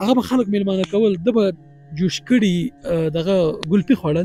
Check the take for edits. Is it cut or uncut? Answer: uncut